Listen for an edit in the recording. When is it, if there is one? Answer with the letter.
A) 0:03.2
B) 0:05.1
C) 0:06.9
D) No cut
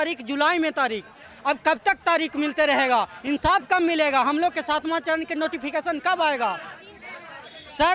D